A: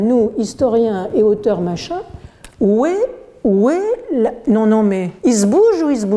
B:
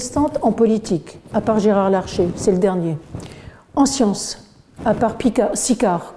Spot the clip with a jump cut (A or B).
A